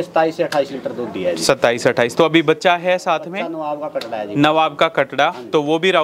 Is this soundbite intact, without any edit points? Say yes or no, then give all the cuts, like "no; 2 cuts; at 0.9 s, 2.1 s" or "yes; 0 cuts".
yes; 0 cuts